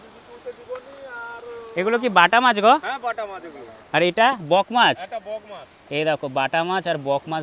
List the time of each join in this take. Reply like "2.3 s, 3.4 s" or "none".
none